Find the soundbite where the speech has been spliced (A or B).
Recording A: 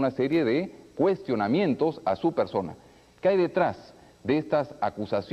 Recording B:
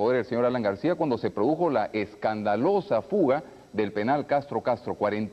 A